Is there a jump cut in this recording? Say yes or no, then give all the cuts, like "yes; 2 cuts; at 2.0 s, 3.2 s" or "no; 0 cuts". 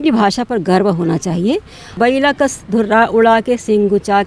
yes; 1 cut; at 1.9 s